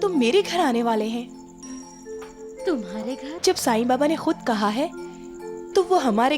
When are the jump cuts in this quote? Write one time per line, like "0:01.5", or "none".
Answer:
0:03.3